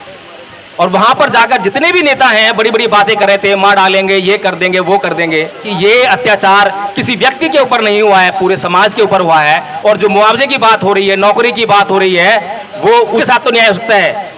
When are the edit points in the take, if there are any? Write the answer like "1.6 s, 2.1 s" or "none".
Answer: 5.7 s, 13.2 s